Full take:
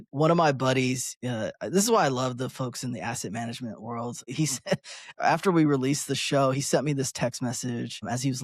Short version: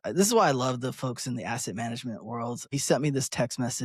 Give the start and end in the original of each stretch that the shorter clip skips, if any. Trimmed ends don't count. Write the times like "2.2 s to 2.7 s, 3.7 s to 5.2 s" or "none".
4.3 s to 6.6 s